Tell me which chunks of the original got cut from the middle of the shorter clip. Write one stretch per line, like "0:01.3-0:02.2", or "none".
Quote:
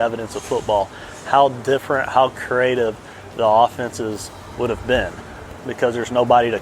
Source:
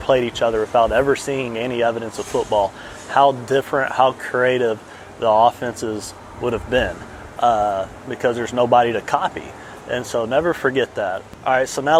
0:07.3-0:07.9